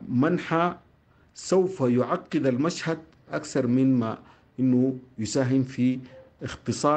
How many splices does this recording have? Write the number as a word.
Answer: zero